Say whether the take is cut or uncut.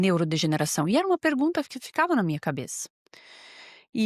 uncut